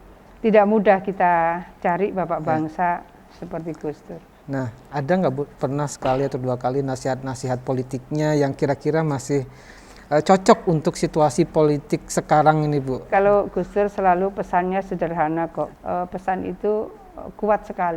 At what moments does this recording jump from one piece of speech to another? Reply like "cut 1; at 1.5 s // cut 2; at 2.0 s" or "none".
cut 1; at 13.1 s // cut 2; at 15.7 s